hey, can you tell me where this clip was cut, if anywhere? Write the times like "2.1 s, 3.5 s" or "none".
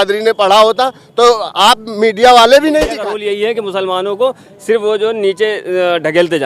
3.1 s